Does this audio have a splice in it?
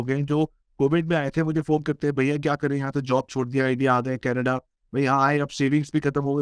no; 0 cuts

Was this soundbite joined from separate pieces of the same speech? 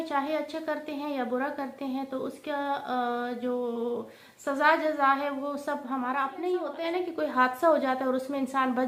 yes; 1 cut; at 6.7 s

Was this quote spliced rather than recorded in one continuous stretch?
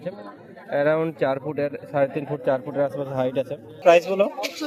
yes; 1 cut; at 3.7 s

